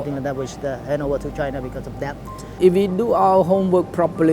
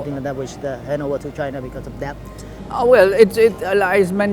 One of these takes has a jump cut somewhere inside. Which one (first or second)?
first